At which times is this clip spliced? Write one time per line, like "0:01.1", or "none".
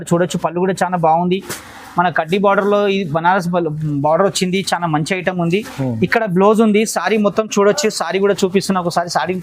none

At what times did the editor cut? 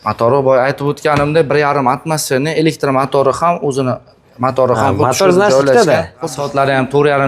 0:06.4

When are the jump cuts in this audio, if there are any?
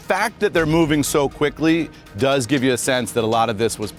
none

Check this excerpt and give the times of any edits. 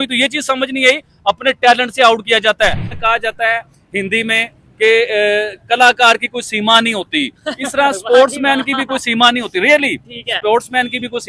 0:02.9

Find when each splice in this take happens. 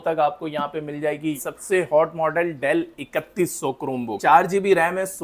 0:01.4
0:04.2

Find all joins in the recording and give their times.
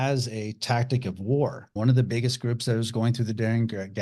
0:01.7

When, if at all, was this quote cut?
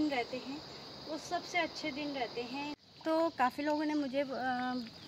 0:02.8

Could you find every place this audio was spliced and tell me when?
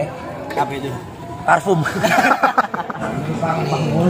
0:02.9

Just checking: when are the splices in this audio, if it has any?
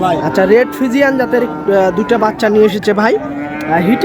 none

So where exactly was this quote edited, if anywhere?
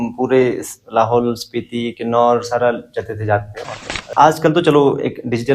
0:04.1

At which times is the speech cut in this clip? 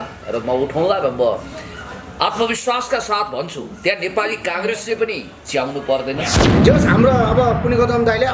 0:06.5

